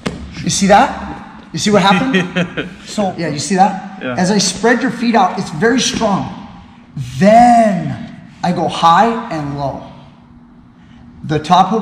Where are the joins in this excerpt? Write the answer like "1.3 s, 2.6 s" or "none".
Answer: 2.9 s

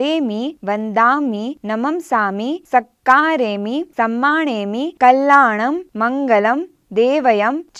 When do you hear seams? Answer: none

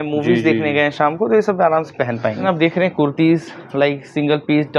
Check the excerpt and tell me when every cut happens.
2.4 s

